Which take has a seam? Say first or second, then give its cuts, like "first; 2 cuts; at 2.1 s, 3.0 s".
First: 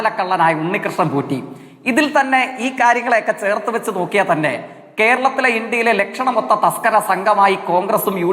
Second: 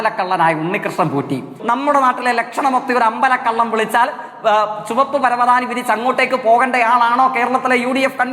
second; 1 cut; at 1.5 s